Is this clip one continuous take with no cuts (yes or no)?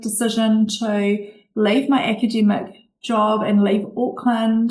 yes